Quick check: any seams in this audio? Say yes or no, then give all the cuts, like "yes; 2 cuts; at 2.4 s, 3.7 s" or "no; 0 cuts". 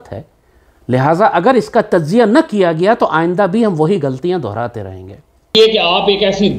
yes; 1 cut; at 5.5 s